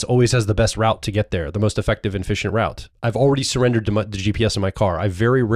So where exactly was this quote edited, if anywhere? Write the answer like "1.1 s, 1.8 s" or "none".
2.9 s